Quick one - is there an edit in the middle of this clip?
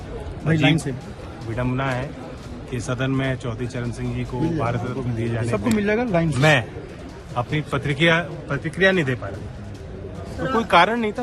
no; 0 cuts

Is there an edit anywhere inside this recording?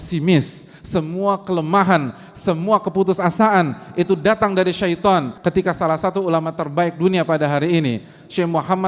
yes; 1 cut; at 5.3 s

